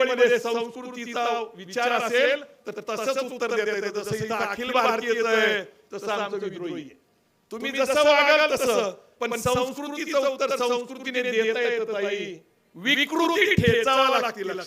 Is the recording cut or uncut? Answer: uncut